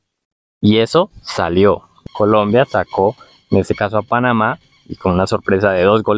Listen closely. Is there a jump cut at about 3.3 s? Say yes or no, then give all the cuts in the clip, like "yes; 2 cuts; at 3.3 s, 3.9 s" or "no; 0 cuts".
no; 1 cut; at 1.9 s